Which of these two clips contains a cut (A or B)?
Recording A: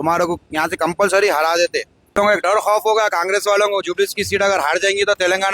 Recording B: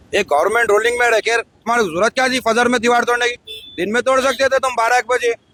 A